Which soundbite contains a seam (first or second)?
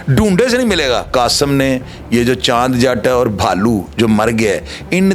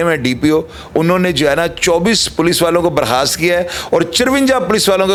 first